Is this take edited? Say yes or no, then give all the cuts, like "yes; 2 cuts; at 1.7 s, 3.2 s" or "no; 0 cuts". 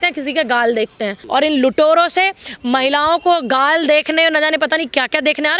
yes; 1 cut; at 1.2 s